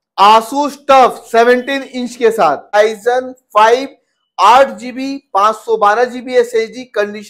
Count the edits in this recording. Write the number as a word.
one